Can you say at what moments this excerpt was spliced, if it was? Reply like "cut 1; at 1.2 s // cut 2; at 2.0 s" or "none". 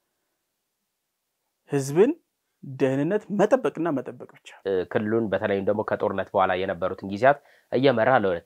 cut 1; at 4.5 s